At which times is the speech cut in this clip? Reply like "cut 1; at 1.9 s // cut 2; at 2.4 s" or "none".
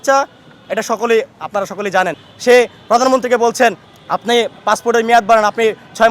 cut 1; at 2.3 s // cut 2; at 3.9 s